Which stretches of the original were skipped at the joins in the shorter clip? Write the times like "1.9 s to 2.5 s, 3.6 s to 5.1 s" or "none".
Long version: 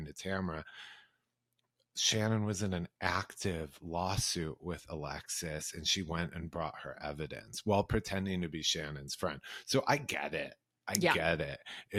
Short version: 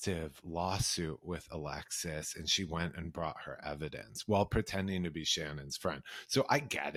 none